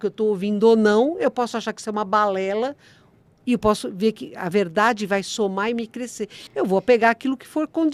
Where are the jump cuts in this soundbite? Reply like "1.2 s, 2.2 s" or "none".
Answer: none

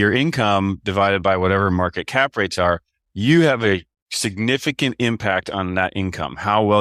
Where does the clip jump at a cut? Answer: none

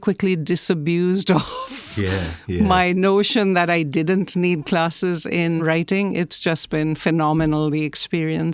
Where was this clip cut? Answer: 5.6 s

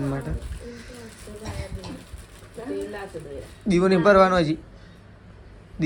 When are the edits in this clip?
none

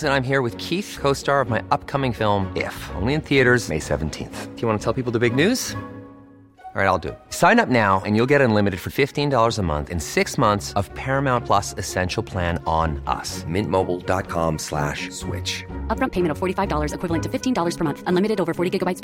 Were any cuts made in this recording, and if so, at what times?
none

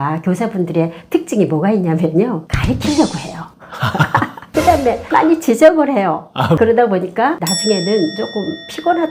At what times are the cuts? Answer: 6.6 s

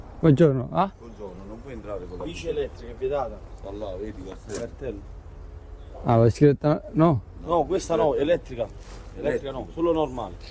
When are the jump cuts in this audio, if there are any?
none

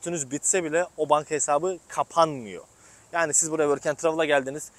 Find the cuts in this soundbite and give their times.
none

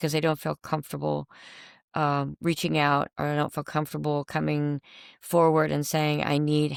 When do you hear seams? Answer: none

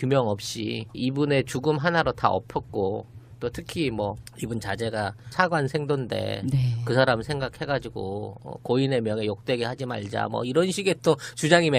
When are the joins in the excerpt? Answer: 5.3 s

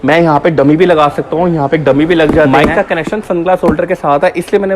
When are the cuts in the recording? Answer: 2.5 s

